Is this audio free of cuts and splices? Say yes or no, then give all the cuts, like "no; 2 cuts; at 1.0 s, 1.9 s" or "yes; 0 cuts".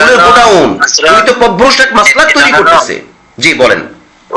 yes; 0 cuts